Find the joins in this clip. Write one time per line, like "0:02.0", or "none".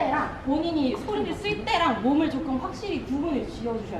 none